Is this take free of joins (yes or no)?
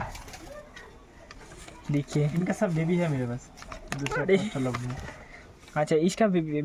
yes